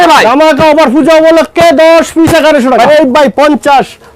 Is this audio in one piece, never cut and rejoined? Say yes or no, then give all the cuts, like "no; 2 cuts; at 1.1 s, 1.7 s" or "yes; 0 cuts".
no; 1 cut; at 2.9 s